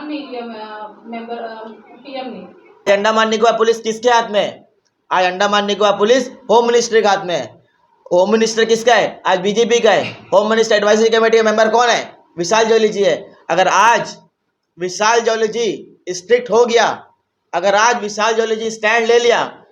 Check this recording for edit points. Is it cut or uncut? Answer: cut